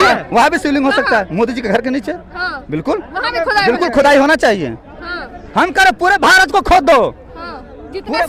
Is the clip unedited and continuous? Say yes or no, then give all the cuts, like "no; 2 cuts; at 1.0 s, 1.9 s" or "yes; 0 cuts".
yes; 0 cuts